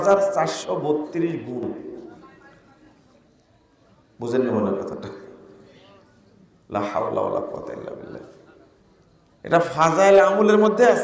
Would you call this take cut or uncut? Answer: uncut